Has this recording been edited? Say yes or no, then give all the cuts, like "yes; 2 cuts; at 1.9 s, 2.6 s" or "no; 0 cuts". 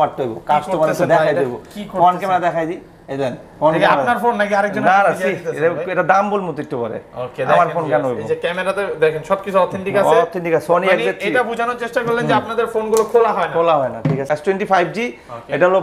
yes; 1 cut; at 14.2 s